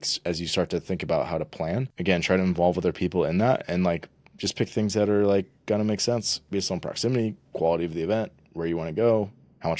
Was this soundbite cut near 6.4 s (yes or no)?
yes